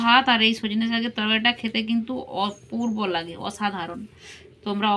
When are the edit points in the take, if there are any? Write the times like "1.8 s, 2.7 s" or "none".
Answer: none